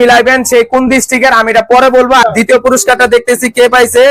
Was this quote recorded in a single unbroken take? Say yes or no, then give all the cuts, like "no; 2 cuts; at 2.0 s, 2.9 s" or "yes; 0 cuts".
no; 1 cut; at 2.2 s